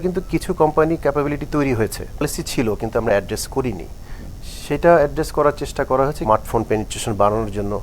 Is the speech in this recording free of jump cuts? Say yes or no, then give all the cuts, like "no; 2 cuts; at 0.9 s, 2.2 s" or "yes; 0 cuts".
no; 2 cuts; at 2.2 s, 6.2 s